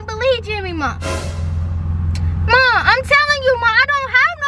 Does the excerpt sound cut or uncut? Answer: uncut